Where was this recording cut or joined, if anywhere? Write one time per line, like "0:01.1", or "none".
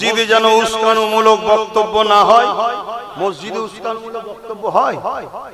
0:03.1